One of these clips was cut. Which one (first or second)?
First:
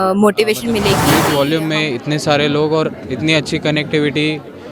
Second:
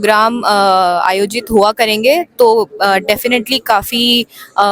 first